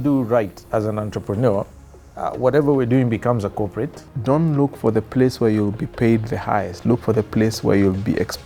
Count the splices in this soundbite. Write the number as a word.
one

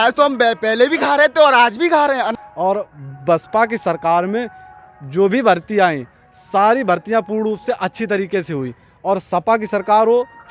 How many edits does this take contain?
one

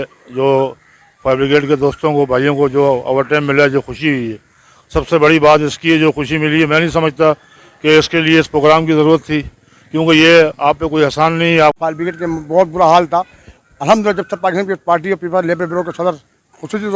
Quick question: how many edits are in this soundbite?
one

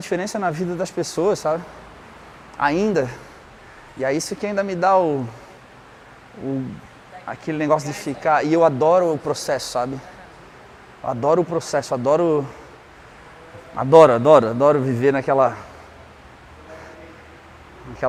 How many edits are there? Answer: zero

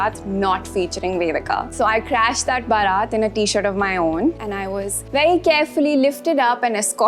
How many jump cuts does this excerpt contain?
one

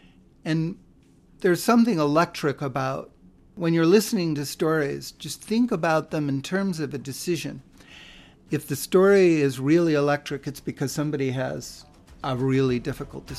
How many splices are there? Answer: two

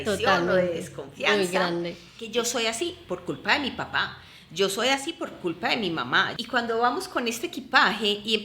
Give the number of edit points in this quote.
two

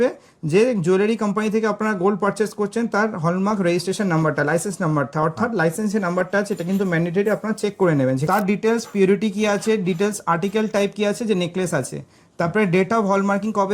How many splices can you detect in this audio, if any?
one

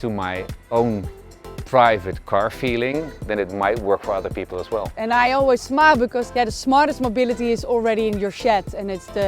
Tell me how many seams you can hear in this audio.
two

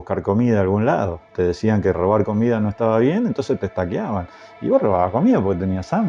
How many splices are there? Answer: one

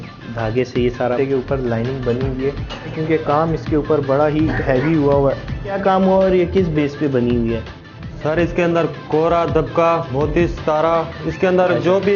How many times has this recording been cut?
four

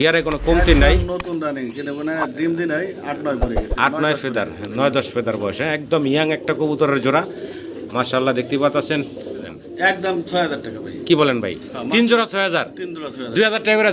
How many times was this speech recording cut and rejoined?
one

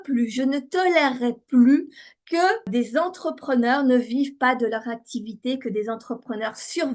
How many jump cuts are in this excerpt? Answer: one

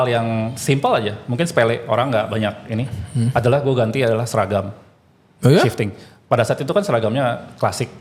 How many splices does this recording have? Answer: zero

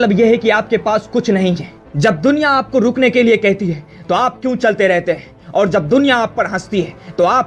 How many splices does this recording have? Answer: one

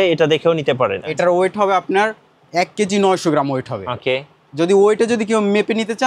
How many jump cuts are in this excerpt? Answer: one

